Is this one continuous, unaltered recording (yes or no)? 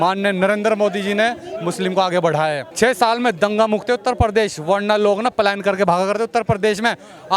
no